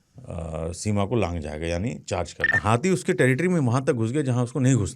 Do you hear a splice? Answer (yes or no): yes